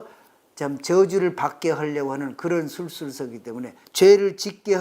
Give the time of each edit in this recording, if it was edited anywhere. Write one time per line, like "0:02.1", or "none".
0:03.8